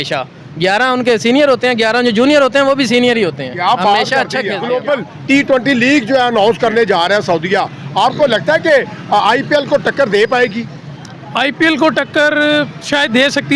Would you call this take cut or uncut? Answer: cut